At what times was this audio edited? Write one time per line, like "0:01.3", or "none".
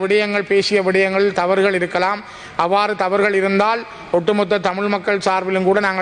none